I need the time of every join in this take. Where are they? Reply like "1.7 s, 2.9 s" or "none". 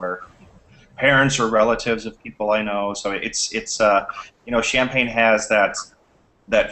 5.3 s